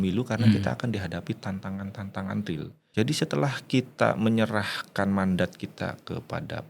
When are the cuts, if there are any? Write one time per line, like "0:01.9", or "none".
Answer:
0:02.8